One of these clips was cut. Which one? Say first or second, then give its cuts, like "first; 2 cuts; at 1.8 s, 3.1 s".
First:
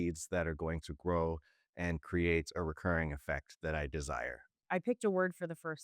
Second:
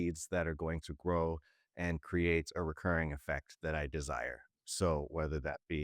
first; 1 cut; at 4.5 s